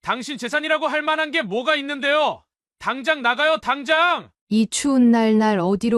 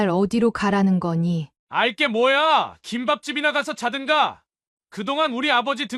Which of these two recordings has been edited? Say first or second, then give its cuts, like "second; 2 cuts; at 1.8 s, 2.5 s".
second; 1 cut; at 1.5 s